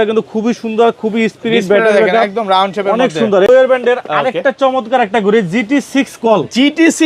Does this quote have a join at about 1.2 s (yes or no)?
no